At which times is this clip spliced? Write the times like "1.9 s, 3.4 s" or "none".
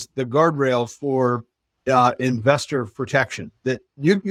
none